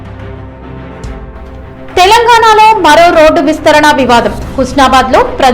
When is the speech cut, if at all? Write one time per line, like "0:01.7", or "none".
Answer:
0:01.3

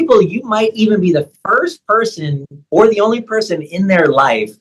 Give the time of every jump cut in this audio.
none

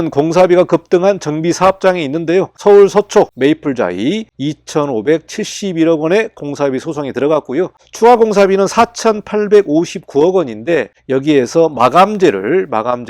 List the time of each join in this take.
0:02.6
0:03.3
0:04.3

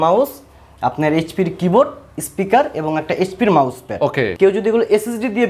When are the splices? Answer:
0:04.3

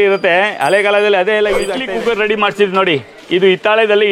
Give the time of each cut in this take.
0:01.8

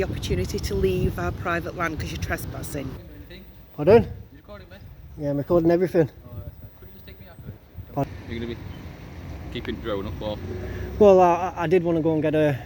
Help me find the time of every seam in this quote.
0:03.0
0:08.0

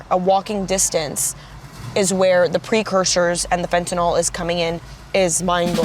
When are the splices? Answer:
0:04.9

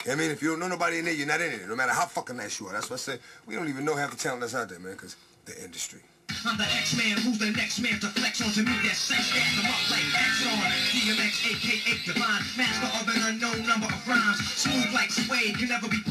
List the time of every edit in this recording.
none

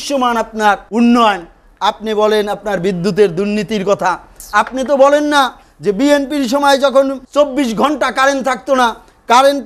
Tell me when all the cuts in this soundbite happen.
0:00.8
0:07.2

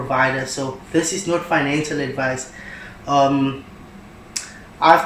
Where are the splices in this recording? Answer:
none

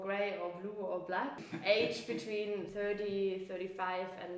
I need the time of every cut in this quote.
0:01.5
0:02.7

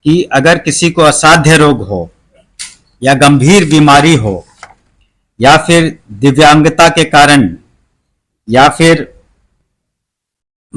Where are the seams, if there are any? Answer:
none

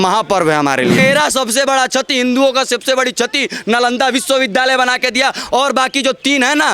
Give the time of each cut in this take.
0:01.0

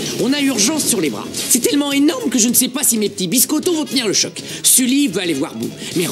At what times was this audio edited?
none

